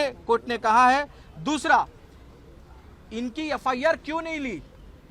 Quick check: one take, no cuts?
yes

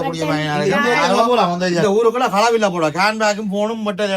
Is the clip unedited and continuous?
no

